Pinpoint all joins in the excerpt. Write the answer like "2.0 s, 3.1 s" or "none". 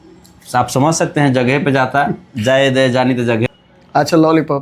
3.5 s